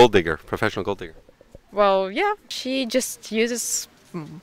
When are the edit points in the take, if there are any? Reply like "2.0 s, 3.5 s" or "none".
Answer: 2.5 s

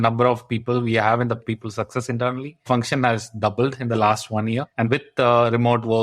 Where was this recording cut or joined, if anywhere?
1.4 s, 2.7 s, 4.8 s

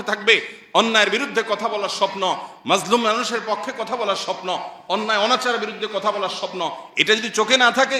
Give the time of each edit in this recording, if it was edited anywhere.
none

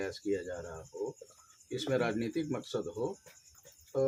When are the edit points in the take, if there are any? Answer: none

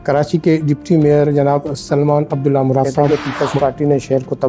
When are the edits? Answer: 3.0 s

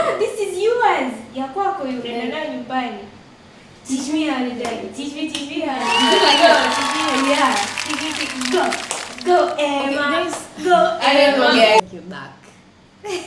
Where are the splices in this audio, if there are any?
11.8 s

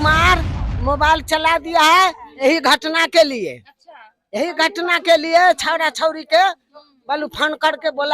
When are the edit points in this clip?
1.4 s

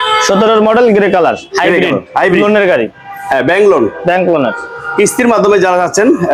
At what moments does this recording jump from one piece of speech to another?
none

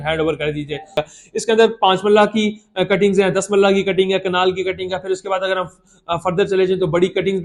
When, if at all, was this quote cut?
1.0 s

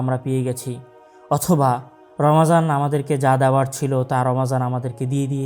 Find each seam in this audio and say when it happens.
none

